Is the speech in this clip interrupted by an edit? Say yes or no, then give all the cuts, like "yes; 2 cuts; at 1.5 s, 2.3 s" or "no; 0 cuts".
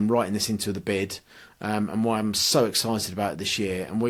no; 0 cuts